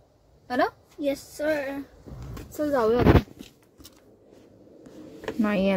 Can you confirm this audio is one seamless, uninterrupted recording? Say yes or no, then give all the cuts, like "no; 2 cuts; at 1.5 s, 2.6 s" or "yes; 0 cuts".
yes; 0 cuts